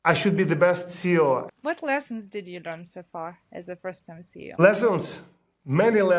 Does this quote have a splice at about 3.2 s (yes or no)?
no